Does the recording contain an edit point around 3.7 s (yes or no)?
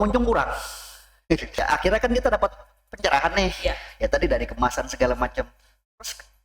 no